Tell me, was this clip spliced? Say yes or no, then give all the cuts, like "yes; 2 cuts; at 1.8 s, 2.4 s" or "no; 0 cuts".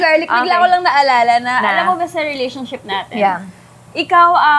no; 0 cuts